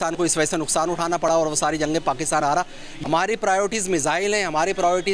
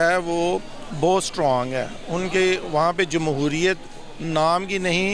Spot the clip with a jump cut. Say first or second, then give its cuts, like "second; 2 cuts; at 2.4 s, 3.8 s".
first; 1 cut; at 2.9 s